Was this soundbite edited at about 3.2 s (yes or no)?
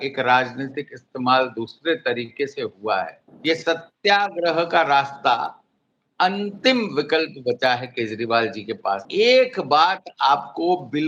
yes